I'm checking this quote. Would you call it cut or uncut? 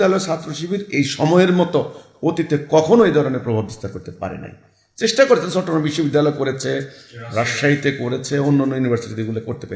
uncut